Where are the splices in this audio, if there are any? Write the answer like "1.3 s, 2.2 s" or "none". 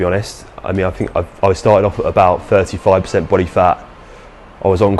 none